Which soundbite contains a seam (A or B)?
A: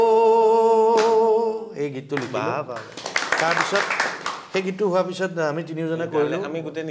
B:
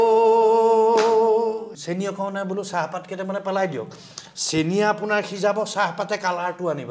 B